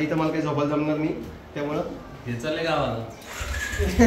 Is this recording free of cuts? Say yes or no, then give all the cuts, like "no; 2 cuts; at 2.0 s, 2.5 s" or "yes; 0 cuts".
yes; 0 cuts